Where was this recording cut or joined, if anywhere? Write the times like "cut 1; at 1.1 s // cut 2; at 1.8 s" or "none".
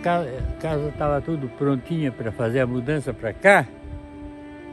none